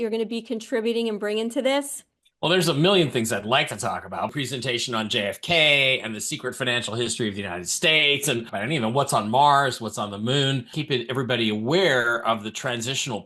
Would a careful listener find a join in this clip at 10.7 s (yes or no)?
yes